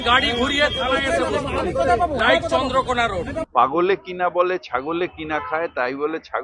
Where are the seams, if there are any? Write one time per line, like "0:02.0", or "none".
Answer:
0:03.4